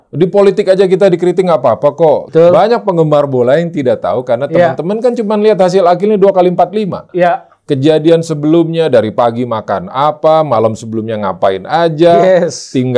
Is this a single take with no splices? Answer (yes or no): no